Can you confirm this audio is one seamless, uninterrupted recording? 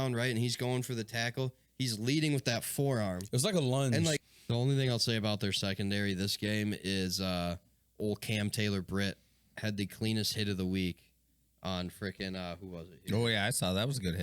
no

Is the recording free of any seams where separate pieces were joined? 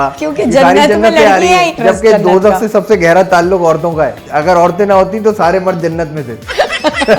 no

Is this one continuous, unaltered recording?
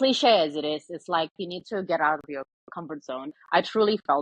yes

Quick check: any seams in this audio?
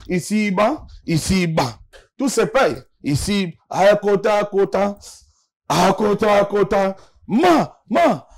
no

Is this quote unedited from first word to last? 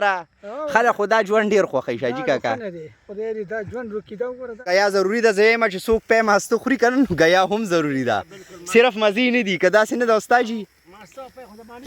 no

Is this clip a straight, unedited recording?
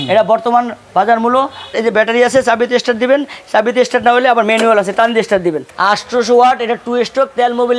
no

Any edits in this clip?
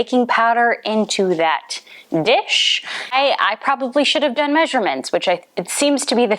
yes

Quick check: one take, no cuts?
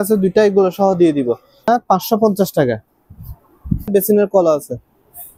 no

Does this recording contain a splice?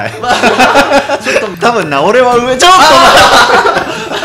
yes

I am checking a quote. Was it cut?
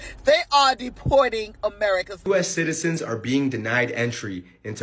yes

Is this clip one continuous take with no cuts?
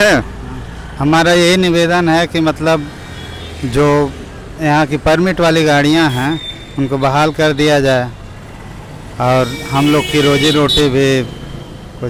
yes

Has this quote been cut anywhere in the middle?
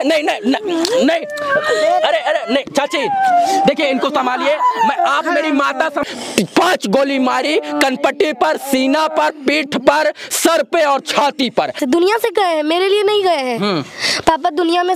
yes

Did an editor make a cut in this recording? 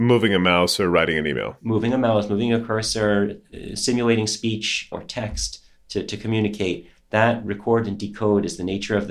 no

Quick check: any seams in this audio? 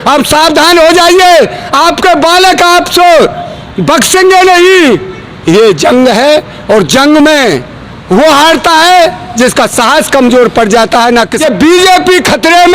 yes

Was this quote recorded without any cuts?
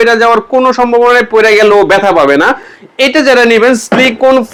yes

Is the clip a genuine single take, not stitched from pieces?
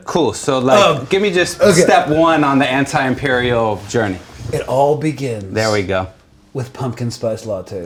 yes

